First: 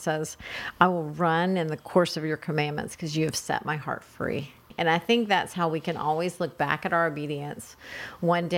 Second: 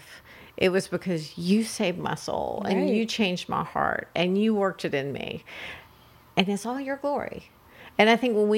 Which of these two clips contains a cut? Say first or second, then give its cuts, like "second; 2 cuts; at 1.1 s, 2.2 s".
first; 1 cut; at 4.6 s